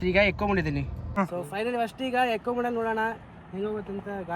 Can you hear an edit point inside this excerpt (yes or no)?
yes